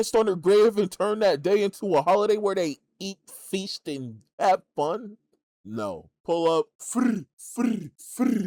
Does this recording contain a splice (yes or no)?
no